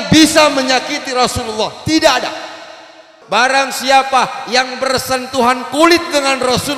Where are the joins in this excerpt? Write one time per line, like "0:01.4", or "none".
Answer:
0:03.1

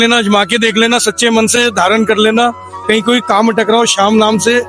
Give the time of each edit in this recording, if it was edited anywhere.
none

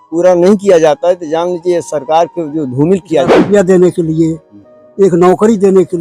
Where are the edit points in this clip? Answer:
0:03.3

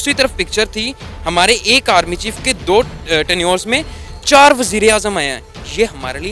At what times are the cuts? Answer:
0:02.6

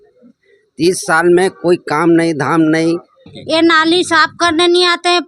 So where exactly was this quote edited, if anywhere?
0:03.3

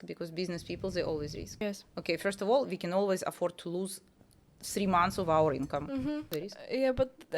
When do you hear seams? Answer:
0:01.6
0:06.3

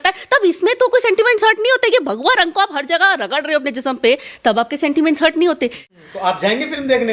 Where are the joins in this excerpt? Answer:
0:05.8

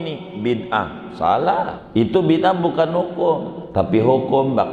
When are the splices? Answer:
0:01.9
0:03.6

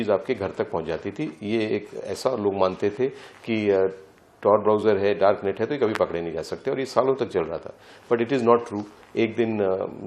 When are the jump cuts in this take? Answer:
none

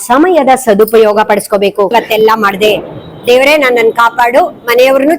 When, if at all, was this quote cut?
0:01.9

